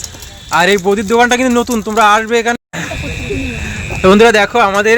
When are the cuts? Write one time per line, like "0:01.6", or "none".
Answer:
0:02.6